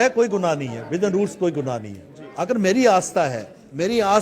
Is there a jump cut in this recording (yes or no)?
yes